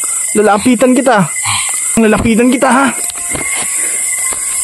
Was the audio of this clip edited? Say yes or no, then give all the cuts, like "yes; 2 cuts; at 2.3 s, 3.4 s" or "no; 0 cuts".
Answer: yes; 1 cut; at 2.0 s